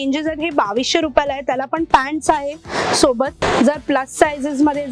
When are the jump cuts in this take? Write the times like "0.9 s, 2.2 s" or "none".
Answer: 3.4 s